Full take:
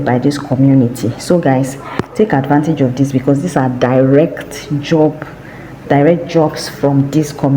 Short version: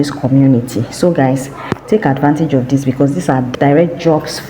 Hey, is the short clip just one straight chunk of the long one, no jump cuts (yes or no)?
no